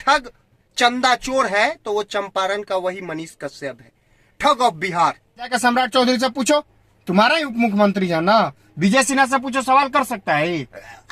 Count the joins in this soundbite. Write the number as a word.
one